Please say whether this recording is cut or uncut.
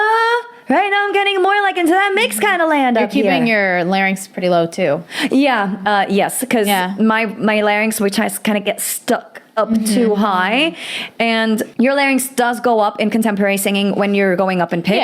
cut